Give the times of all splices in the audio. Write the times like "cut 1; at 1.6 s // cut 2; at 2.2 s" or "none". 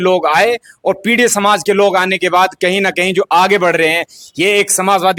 none